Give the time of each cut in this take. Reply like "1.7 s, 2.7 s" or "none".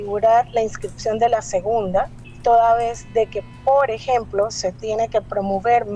2.2 s